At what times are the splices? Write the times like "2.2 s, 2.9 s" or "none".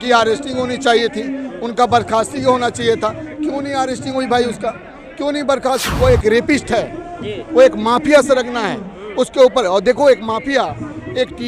5.9 s